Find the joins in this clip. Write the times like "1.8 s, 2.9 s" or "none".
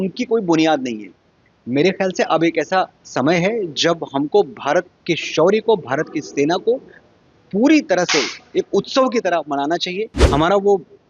10.1 s